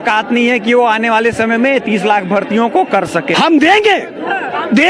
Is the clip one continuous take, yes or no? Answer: no